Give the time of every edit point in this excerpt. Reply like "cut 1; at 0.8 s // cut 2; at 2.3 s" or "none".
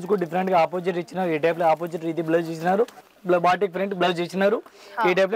cut 1; at 3.0 s

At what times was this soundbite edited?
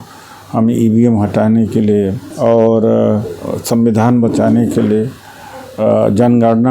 cut 1; at 2.2 s

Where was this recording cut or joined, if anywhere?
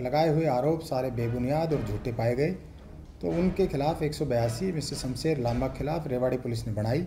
none

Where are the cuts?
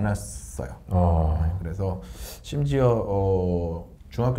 none

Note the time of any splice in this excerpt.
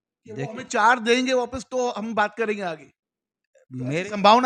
none

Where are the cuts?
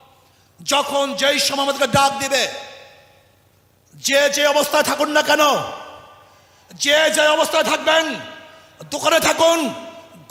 none

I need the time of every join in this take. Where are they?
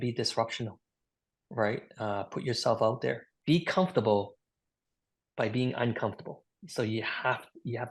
none

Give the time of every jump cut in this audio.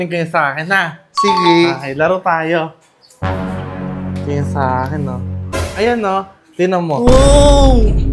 cut 1; at 5.6 s

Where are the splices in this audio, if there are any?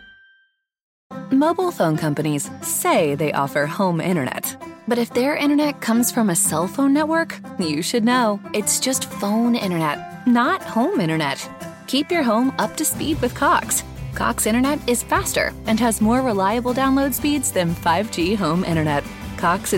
cut 1; at 0.9 s

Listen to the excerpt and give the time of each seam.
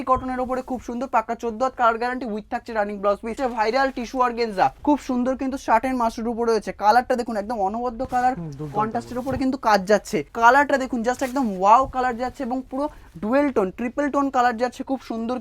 cut 1; at 3.4 s // cut 2; at 4.8 s // cut 3; at 10.3 s

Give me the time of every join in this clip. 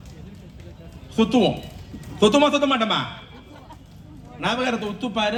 none

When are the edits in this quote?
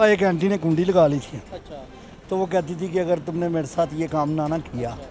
none

